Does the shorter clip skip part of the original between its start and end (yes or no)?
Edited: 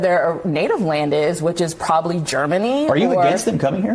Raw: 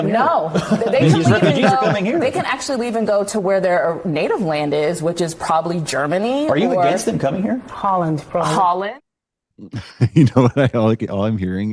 no